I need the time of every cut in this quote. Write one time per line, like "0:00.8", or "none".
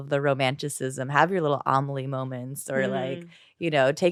none